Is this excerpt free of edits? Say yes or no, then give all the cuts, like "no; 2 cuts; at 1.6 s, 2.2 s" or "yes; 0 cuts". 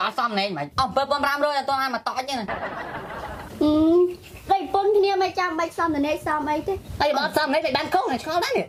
yes; 0 cuts